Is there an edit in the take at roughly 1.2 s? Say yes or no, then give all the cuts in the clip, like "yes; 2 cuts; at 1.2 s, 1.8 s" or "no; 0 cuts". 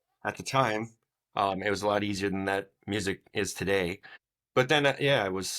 no; 1 cut; at 4.0 s